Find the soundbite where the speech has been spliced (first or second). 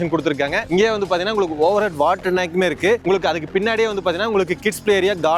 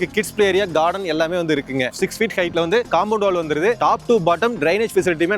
second